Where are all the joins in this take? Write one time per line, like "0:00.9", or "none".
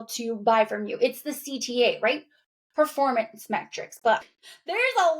0:04.3